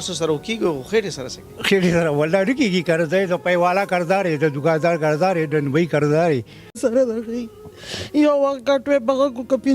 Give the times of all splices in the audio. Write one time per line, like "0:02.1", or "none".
0:06.8